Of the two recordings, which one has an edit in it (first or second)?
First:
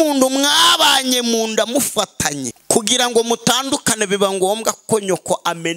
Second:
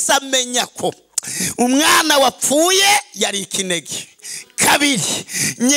first